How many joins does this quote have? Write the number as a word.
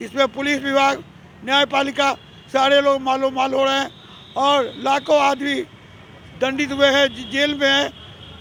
zero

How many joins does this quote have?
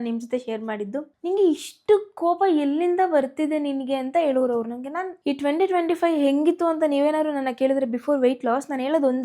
two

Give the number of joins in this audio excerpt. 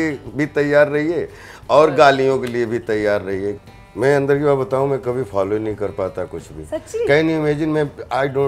one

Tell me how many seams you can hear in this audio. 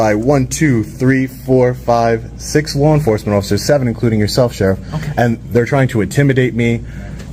zero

